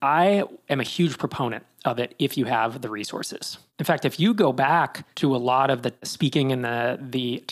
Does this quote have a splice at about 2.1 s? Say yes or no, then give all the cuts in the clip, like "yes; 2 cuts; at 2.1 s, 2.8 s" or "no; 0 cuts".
no; 2 cuts; at 5.0 s, 6.1 s